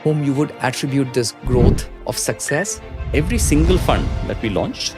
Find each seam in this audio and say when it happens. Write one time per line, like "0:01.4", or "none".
0:01.9
0:02.9